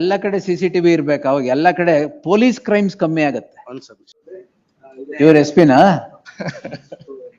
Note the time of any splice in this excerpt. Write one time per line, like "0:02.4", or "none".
0:04.2